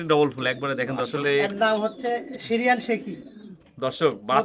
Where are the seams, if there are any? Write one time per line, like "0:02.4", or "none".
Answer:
0:01.1